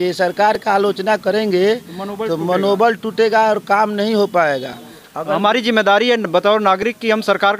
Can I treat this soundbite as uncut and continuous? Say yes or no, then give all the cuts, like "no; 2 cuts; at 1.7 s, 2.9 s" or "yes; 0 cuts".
yes; 0 cuts